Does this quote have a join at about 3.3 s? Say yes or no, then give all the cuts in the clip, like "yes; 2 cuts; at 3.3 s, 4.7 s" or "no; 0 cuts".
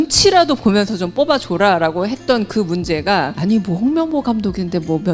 yes; 1 cut; at 3.3 s